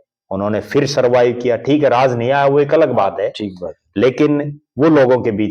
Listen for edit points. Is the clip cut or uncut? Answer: uncut